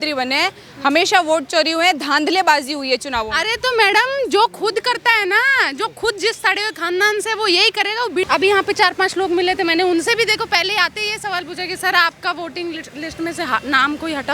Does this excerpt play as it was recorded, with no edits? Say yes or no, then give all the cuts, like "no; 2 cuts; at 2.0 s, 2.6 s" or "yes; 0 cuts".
no; 1 cut; at 8.3 s